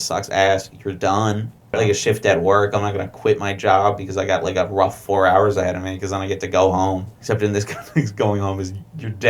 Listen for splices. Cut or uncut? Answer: cut